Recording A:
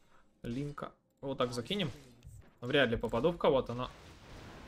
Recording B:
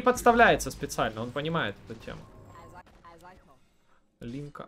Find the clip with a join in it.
B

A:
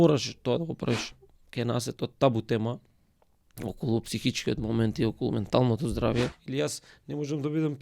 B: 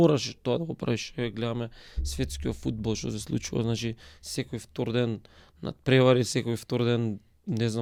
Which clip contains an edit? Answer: A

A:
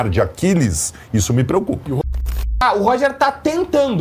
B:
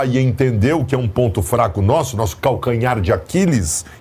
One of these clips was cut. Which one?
A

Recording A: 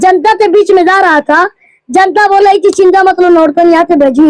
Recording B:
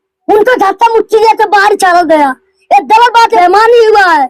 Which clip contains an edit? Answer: B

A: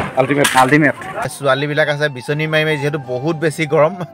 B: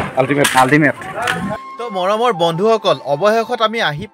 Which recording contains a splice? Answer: A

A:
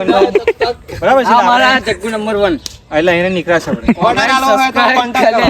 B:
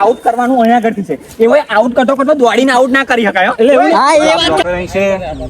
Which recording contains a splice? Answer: B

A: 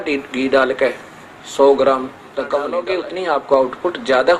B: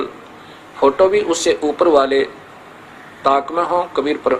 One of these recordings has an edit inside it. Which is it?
A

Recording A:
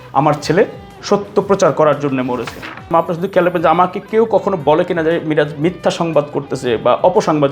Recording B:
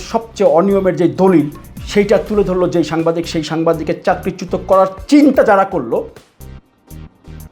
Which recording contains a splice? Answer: A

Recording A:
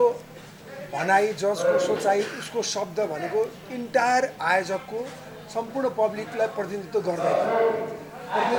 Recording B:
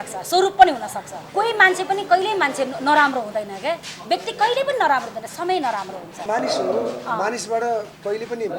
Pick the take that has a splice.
B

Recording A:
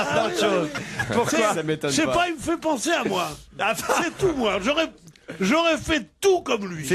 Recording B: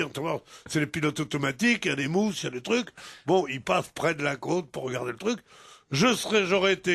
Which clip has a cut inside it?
B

